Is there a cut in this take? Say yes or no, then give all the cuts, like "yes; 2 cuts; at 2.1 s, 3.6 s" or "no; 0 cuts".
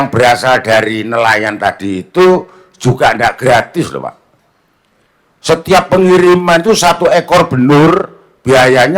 no; 0 cuts